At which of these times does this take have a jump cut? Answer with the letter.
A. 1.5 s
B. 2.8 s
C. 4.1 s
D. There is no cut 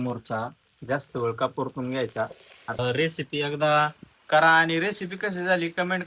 B